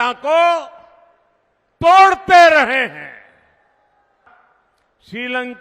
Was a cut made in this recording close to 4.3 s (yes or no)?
yes